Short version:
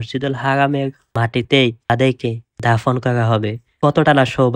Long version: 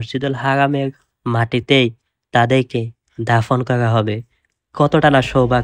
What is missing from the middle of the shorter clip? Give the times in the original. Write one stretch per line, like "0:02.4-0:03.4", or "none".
0:01.1-0:01.2
0:02.3-0:02.8
0:04.3-0:04.6